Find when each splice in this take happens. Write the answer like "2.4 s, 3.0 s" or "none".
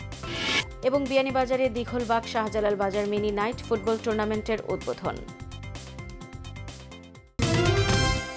7.3 s